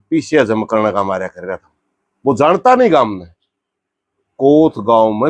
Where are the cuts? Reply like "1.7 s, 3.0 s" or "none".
none